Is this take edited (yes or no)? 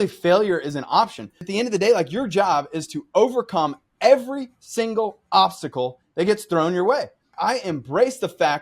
yes